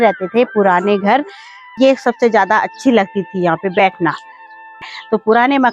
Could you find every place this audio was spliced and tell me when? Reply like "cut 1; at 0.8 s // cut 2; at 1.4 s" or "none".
cut 1; at 1.7 s // cut 2; at 4.8 s